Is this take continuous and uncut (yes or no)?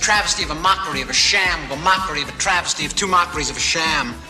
yes